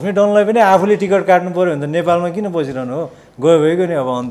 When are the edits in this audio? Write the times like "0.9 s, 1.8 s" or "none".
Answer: none